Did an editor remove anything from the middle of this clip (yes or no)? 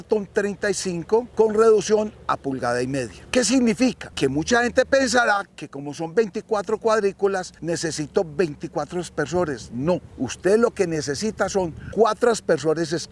yes